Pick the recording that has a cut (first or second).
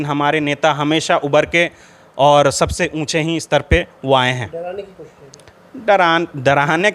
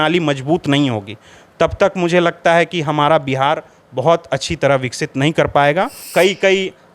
second